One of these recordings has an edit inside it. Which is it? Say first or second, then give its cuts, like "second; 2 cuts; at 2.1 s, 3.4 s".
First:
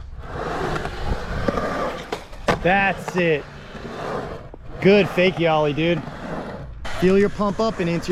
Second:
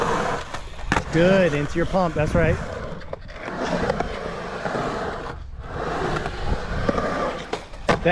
first; 1 cut; at 6.9 s